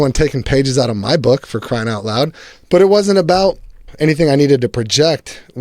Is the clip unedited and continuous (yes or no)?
no